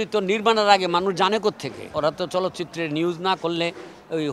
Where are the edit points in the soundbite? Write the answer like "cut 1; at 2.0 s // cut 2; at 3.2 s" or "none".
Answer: cut 1; at 1.9 s